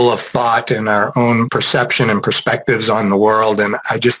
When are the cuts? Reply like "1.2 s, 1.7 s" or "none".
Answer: 1.5 s